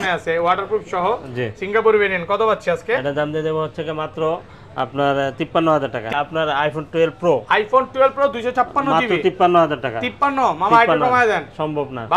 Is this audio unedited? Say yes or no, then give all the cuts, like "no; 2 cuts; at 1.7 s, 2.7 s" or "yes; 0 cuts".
no; 1 cut; at 6.1 s